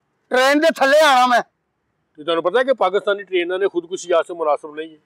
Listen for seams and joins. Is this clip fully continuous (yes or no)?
yes